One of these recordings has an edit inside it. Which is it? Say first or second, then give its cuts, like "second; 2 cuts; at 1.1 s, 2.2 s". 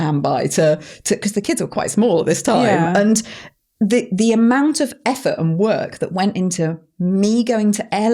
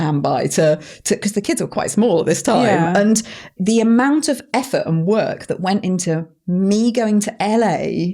second; 1 cut; at 3.6 s